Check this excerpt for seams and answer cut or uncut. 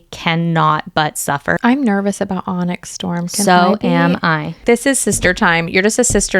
cut